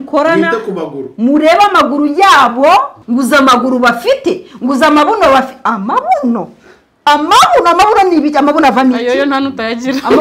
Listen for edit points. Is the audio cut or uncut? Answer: cut